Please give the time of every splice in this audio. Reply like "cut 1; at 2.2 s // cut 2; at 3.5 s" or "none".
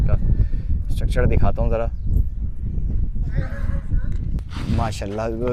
none